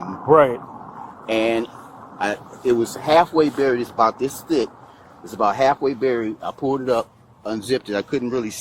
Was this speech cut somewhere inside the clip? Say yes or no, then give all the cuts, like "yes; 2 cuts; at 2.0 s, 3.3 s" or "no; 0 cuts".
no; 0 cuts